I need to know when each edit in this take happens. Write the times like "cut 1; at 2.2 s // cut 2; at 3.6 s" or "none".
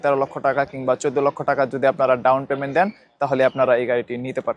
none